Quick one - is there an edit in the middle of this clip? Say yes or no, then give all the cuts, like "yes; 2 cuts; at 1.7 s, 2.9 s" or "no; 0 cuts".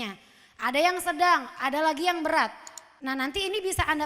yes; 1 cut; at 3.0 s